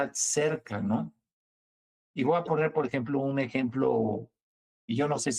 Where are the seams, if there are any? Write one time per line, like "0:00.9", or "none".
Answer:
none